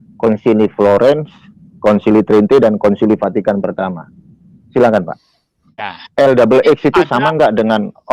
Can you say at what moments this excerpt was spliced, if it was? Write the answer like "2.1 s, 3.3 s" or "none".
6.0 s